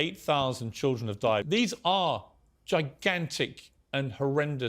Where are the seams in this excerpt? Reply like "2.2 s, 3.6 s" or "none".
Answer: 1.5 s